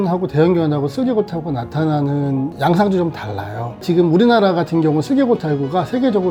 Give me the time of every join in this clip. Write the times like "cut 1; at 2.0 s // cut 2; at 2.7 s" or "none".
none